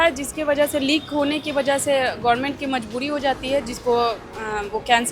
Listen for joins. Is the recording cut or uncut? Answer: uncut